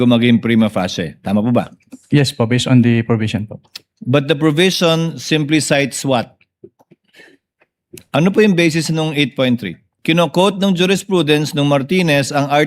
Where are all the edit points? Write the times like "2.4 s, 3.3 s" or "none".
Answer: 9.9 s